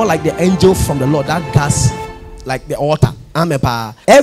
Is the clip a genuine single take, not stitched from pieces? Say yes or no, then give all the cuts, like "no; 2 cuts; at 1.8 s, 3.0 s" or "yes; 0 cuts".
yes; 0 cuts